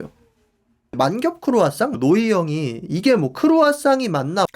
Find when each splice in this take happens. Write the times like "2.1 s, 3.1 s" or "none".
0.9 s, 2.0 s